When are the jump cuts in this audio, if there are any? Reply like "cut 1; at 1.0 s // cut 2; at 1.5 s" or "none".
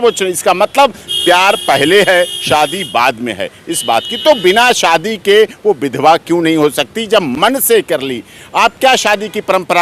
none